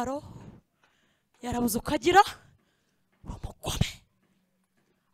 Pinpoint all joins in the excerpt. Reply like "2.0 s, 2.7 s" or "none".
none